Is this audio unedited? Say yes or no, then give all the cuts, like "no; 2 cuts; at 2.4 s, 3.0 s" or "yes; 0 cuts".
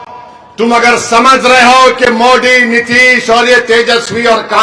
yes; 0 cuts